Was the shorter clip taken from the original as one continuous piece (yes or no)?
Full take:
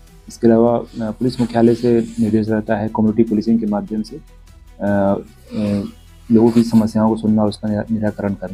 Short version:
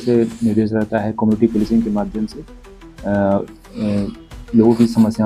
yes